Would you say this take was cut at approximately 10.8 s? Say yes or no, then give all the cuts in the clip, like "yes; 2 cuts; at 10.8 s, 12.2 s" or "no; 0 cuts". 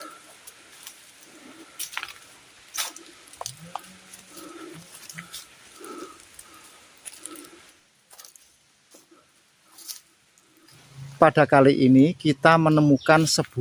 yes; 2 cuts; at 7.8 s, 10.8 s